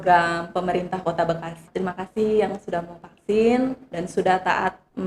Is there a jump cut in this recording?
yes; 1 cut; at 1.7 s

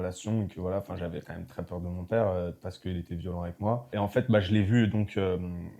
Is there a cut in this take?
no; 0 cuts

